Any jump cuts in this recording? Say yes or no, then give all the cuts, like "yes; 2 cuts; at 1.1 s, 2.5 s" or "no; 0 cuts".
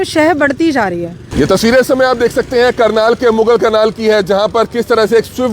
yes; 1 cut; at 1.2 s